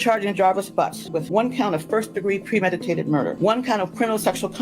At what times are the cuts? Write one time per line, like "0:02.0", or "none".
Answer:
0:01.1
0:03.4